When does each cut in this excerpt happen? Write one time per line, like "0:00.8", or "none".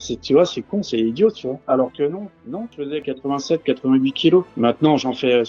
0:01.6
0:03.0